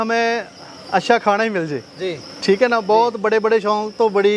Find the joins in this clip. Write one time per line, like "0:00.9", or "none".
none